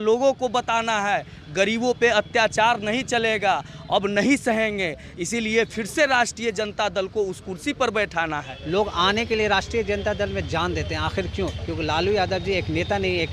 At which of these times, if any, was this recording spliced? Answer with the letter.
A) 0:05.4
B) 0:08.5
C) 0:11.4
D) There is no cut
B